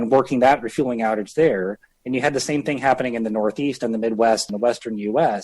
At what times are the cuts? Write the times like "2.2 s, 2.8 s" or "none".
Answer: 4.5 s